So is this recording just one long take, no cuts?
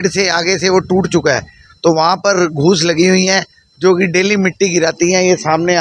yes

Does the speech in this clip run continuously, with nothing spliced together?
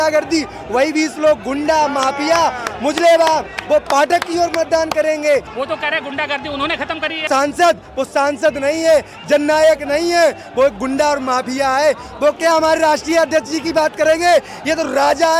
no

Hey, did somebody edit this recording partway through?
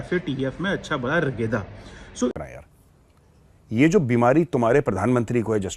yes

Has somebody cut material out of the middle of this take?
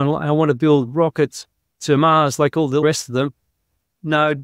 yes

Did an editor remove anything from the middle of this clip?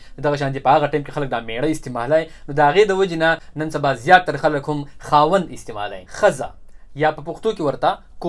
yes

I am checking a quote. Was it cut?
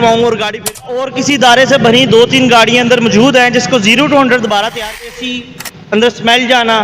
yes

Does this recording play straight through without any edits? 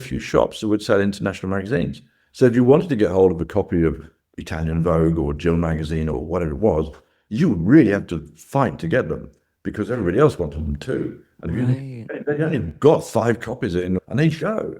no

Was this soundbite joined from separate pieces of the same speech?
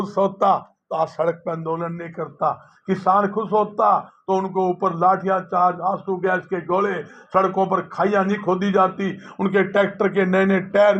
no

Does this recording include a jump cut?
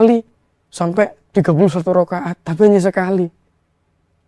yes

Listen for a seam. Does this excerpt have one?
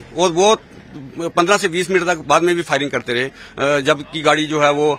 no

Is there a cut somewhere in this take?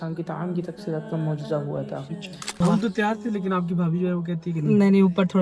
yes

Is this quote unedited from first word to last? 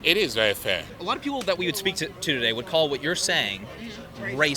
no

